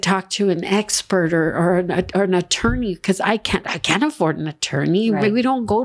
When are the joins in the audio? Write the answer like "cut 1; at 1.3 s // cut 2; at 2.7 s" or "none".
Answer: none